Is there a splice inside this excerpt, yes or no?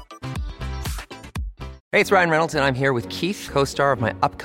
yes